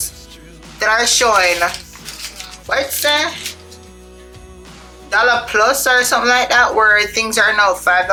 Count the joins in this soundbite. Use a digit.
0